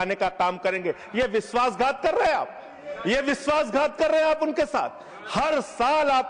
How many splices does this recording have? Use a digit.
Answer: 0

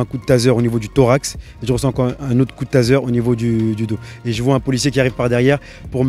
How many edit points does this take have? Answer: 0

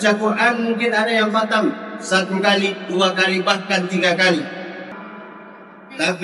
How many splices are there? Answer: 1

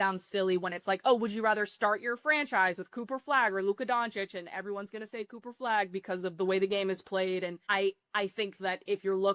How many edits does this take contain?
1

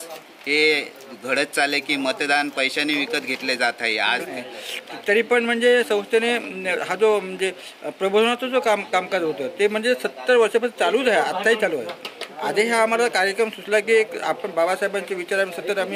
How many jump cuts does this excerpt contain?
1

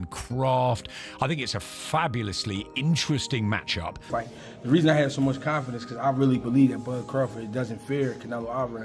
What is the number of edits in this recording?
1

